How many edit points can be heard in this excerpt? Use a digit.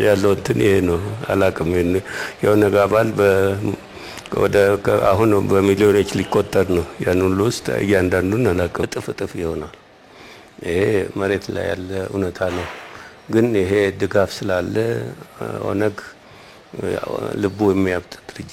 1